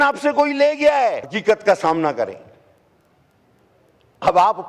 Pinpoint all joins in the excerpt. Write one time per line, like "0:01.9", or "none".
0:01.3